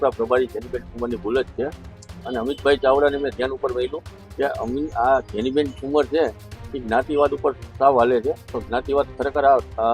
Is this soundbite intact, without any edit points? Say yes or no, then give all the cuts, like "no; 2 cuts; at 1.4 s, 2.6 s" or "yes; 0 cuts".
yes; 0 cuts